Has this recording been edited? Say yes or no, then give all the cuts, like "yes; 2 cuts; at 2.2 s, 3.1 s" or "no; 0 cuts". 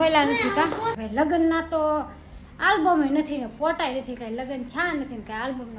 yes; 1 cut; at 1.0 s